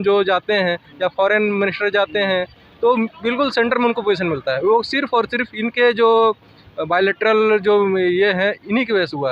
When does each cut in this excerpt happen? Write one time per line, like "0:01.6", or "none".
none